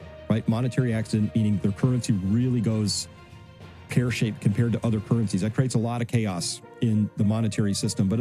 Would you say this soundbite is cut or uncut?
uncut